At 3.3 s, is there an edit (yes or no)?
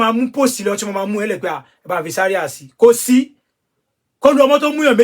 no